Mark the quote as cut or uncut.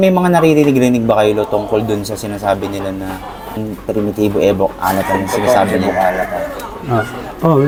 uncut